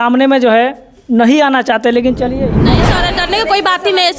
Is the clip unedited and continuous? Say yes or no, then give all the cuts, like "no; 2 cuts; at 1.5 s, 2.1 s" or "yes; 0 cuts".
no; 1 cut; at 2.7 s